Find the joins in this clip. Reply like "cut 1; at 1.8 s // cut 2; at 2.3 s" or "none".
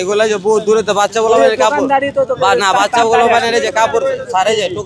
none

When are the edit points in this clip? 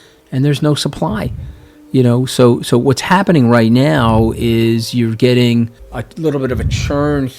none

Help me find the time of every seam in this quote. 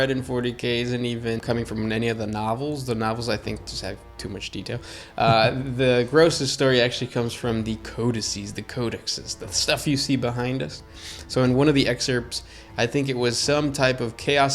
cut 1; at 1.4 s

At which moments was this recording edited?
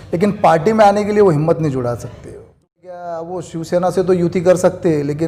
cut 1; at 2.7 s

